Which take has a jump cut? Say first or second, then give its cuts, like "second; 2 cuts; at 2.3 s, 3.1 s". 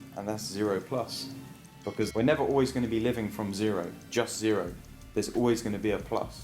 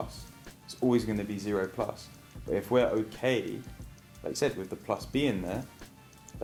first; 1 cut; at 2.1 s